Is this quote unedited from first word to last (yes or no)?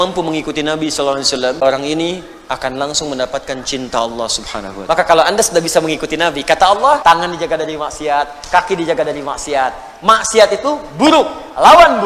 no